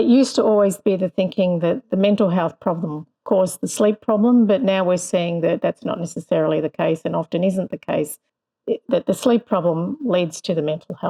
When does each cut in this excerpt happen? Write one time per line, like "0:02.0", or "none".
none